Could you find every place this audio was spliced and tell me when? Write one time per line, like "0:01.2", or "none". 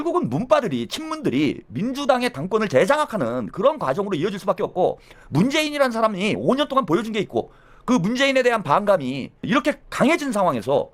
none